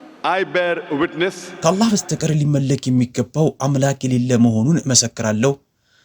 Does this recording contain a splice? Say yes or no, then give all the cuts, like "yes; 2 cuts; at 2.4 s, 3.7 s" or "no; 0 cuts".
yes; 1 cut; at 1.5 s